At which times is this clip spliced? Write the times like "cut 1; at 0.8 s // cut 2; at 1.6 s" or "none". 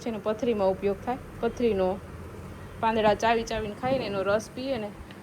none